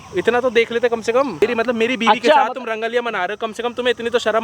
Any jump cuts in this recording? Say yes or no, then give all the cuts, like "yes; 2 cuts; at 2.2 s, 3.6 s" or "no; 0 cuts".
yes; 1 cut; at 1.4 s